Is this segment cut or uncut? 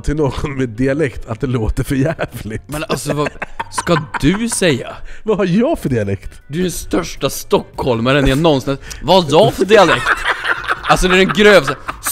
uncut